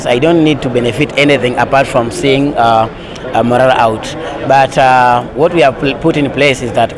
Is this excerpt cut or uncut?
uncut